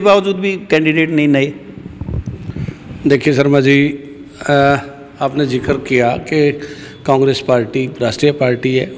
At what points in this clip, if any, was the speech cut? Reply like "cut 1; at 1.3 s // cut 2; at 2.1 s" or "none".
none

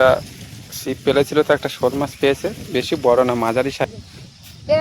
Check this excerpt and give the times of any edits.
cut 1; at 3.9 s

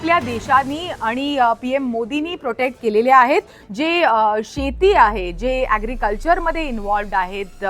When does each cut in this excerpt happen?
cut 1; at 3.6 s

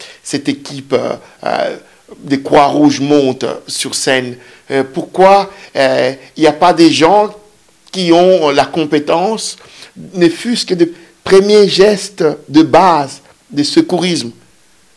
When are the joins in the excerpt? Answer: none

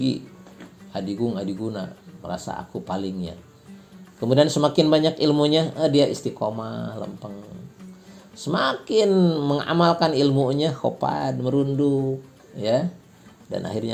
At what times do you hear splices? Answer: none

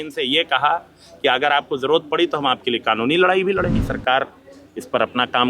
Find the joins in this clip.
cut 1; at 3.8 s

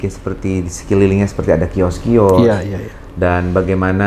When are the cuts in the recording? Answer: none

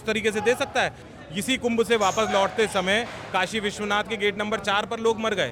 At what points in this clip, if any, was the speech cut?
cut 1; at 1.0 s

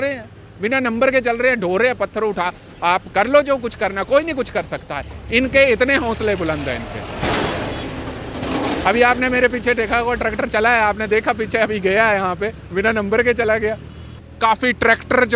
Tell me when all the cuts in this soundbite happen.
cut 1; at 14.2 s

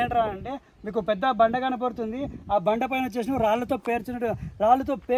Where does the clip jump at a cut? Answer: none

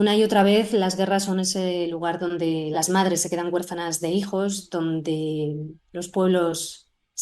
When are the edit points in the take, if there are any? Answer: cut 1; at 2.7 s

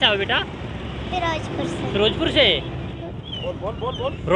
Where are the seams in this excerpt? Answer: cut 1; at 3.1 s

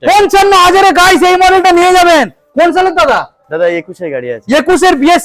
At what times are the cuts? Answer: none

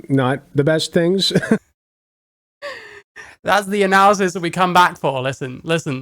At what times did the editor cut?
none

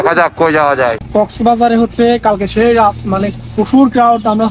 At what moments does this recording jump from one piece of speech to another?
cut 1; at 1.0 s

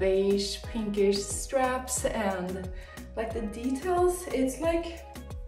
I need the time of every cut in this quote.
none

